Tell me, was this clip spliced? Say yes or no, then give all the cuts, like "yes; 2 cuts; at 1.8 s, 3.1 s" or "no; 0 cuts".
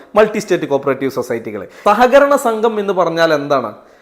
yes; 1 cut; at 1.8 s